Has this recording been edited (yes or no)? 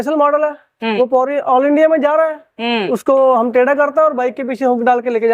no